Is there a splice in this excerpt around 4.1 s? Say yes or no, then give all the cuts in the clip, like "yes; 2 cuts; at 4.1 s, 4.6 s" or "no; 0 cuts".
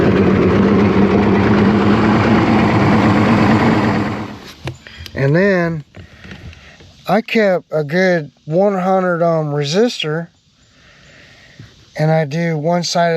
yes; 1 cut; at 4.1 s